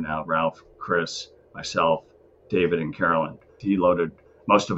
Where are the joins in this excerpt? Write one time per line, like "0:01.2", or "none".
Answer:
0:03.6